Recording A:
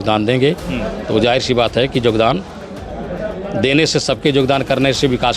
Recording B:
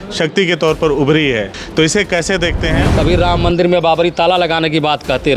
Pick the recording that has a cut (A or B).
B